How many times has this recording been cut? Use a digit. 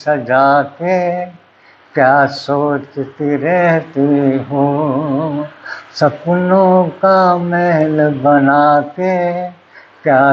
0